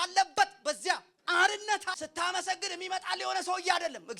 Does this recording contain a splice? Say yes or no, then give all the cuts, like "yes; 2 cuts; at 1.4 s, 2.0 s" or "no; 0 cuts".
yes; 2 cuts; at 1.1 s, 2.0 s